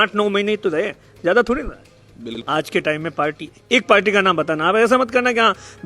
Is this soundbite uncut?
no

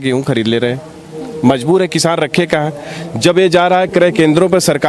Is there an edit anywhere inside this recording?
no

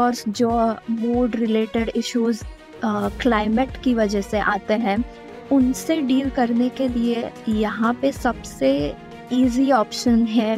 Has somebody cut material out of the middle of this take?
no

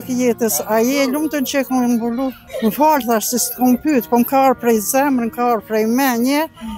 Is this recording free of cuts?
no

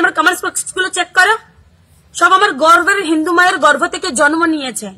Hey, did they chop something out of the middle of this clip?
yes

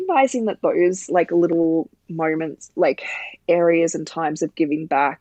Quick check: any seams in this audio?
no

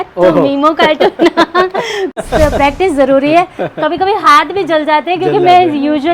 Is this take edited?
yes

